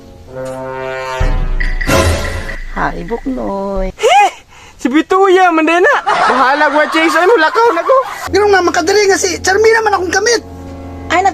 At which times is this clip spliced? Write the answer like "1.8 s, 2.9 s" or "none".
3.9 s, 8.2 s